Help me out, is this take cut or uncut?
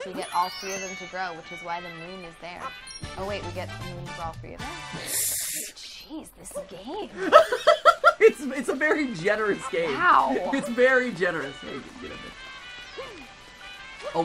uncut